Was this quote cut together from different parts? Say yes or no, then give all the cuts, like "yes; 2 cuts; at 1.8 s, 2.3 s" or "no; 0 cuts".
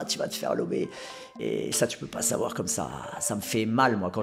yes; 1 cut; at 1.4 s